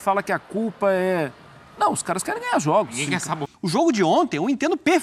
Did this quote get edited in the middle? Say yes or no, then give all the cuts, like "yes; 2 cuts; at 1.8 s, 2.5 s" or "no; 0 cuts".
yes; 1 cut; at 3.4 s